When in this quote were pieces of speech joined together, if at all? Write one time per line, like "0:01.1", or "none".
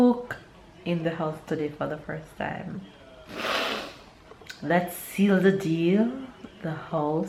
none